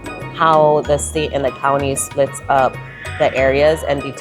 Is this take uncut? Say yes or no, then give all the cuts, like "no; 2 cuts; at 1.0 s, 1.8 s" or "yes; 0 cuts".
yes; 0 cuts